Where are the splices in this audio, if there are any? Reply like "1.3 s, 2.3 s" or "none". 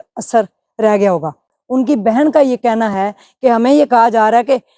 1.5 s